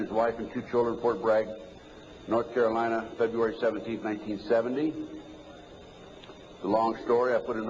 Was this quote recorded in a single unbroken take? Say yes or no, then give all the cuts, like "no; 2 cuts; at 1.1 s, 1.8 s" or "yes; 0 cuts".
no; 1 cut; at 6.3 s